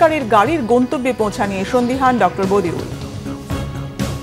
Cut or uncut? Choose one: cut